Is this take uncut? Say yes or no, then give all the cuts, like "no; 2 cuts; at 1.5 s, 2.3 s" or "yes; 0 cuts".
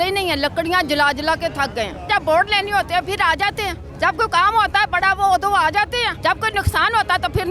no; 3 cuts; at 2.1 s, 3.8 s, 6.1 s